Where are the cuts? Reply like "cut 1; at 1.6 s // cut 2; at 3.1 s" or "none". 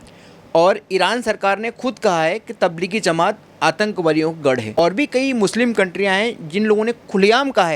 none